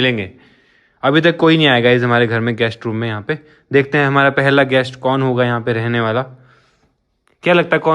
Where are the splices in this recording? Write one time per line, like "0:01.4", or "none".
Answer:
none